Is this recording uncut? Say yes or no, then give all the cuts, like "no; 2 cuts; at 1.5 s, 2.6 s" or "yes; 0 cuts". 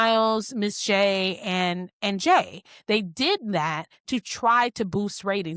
yes; 0 cuts